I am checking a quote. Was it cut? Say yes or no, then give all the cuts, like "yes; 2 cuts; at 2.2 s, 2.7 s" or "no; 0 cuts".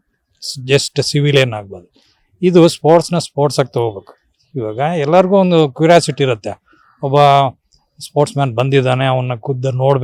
no; 0 cuts